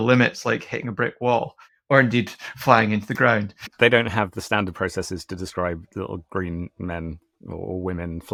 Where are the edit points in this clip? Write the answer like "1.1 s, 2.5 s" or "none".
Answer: none